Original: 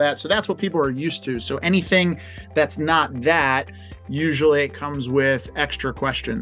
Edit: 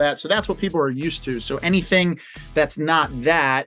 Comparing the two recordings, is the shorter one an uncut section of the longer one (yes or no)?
yes